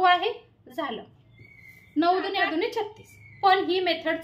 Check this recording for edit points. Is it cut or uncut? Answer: cut